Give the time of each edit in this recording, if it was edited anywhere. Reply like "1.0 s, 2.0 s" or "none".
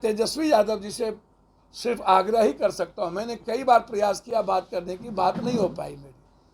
none